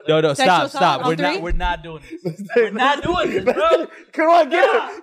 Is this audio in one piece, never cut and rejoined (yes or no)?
yes